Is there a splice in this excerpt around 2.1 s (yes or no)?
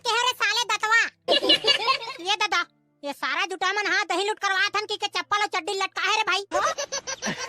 yes